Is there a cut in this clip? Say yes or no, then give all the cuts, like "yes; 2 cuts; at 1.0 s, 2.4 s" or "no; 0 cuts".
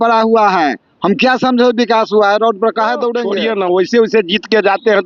yes; 1 cut; at 3.3 s